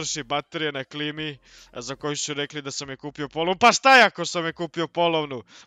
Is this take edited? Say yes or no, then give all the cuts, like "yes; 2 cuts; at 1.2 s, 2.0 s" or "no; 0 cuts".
no; 0 cuts